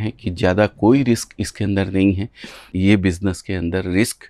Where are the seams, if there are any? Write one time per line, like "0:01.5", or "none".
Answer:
0:02.7